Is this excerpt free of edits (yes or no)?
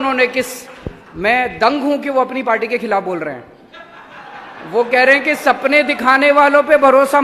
yes